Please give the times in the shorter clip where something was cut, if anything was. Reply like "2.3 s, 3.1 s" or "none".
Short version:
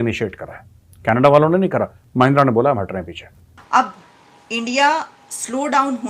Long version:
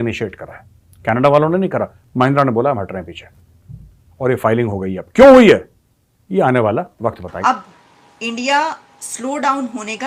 3.6 s

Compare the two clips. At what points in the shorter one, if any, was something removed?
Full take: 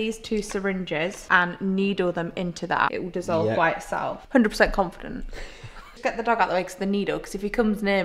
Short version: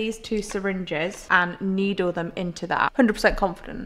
2.9 s

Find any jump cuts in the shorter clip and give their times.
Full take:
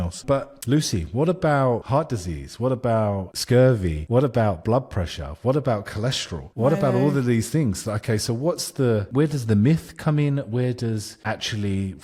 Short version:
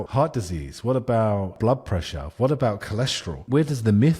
1.5 s, 3.4 s

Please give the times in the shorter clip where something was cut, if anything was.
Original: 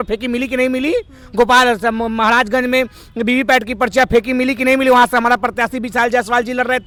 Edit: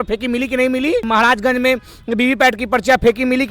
1.1 s

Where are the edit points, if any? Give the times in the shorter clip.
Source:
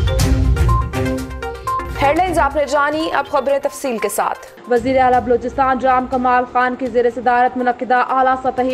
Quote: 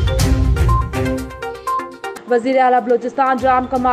2.0 s

